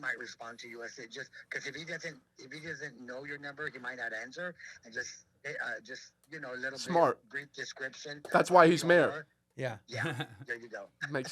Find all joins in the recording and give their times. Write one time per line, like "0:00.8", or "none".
none